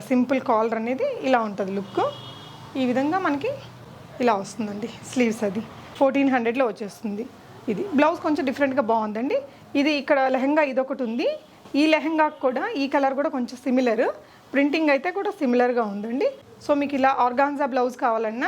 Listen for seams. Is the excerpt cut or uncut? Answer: uncut